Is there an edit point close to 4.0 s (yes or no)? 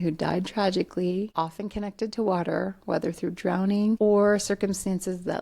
yes